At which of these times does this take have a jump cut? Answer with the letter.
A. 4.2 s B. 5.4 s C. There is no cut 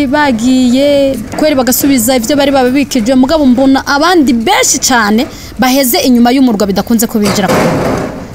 C